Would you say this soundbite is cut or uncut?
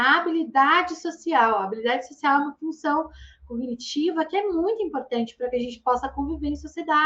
uncut